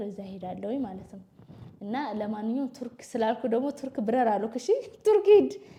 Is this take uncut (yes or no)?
yes